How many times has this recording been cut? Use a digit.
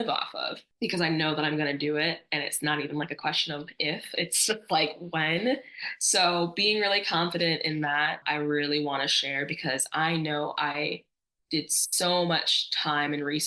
0